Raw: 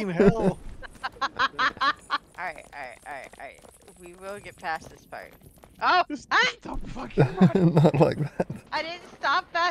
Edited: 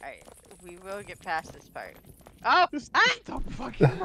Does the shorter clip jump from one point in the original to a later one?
no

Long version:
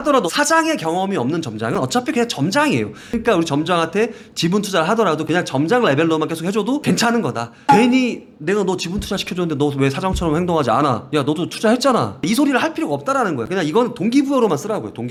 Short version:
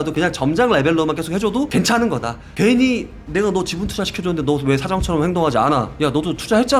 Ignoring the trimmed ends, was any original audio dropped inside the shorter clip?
no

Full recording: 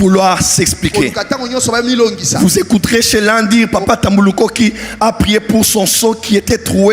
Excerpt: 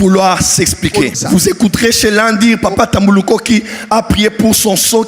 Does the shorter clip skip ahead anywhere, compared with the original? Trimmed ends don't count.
yes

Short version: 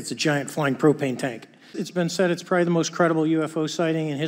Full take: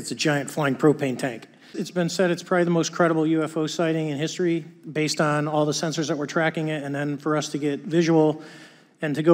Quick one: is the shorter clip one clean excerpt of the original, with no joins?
yes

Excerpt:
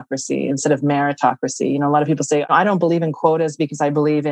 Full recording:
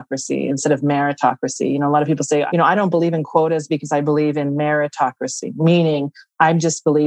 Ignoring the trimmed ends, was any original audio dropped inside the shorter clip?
yes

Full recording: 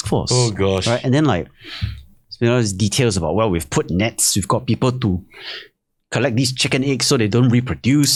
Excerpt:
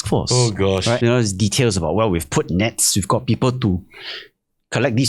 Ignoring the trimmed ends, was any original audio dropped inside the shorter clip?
yes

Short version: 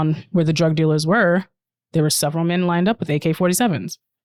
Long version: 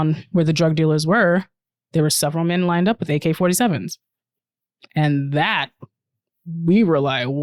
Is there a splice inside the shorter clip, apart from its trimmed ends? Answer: no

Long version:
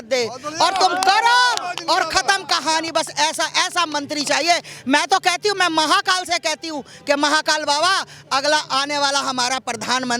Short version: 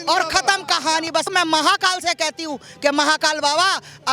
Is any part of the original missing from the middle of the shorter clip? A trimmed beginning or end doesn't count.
yes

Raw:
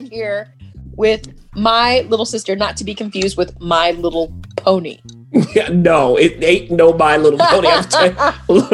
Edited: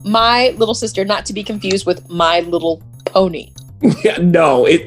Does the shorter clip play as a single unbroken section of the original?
yes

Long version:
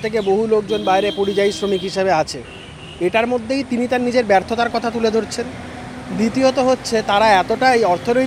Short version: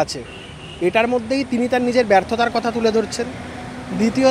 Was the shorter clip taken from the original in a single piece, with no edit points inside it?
yes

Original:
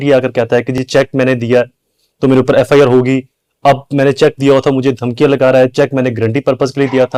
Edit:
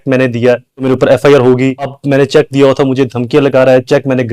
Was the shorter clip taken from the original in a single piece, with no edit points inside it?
no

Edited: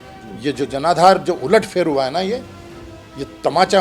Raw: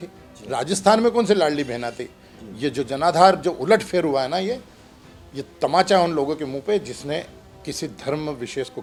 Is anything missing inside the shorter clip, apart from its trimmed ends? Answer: no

